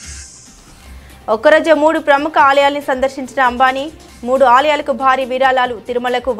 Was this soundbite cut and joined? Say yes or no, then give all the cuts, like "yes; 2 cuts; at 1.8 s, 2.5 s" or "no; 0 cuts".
yes; 1 cut; at 1.1 s